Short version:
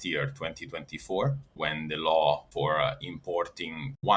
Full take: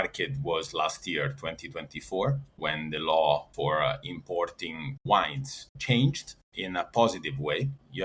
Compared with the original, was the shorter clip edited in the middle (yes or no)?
no